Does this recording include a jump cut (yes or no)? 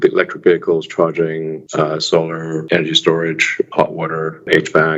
no